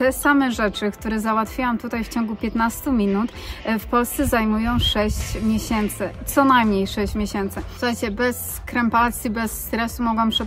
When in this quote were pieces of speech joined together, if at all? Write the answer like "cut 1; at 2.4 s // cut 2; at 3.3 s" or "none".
cut 1; at 7.7 s